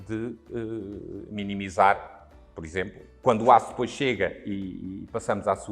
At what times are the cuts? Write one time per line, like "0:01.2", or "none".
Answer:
0:03.0

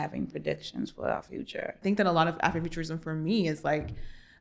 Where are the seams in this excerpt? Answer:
0:01.8

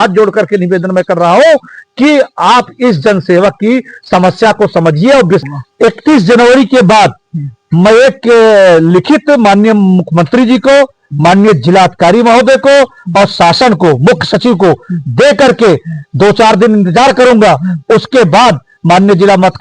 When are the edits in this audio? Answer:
0:05.4

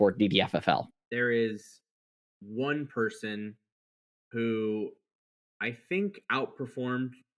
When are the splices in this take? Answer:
0:01.0

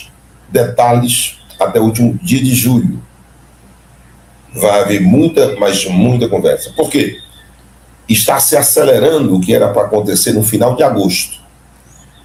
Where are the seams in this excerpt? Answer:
none

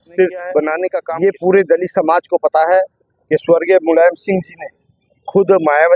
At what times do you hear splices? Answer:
0:01.0

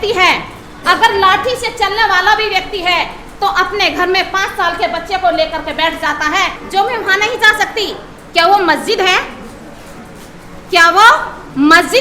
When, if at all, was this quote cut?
0:06.6

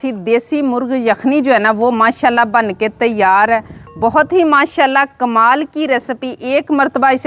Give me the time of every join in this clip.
none

